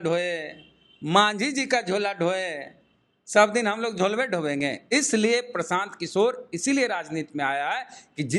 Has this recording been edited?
no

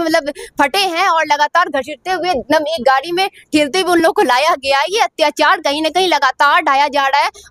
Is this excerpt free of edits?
yes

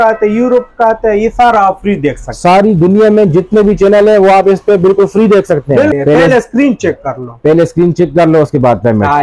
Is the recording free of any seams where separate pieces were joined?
no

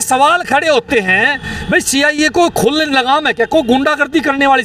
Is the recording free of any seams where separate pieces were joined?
yes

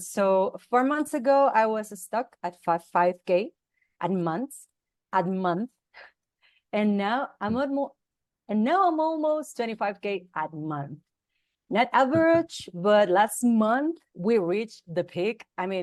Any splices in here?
no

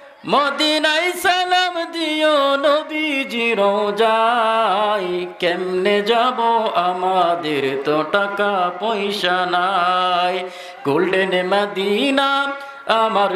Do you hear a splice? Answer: no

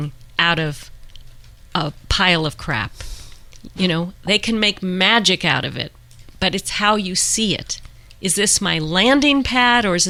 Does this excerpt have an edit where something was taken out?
no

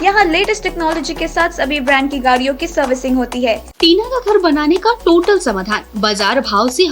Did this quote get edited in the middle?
yes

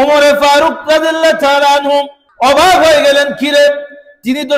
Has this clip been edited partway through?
yes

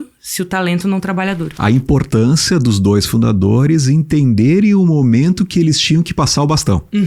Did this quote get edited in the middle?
yes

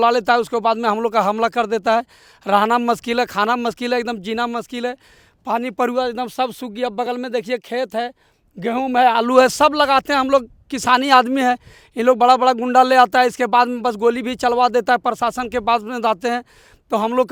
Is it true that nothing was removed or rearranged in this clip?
yes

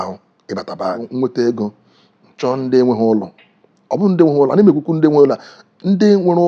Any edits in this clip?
yes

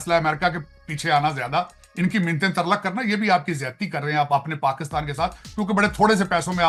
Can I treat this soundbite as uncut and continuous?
yes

